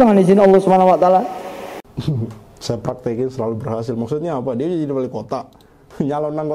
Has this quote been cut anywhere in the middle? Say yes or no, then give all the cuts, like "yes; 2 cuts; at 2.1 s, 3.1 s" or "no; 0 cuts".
no; 0 cuts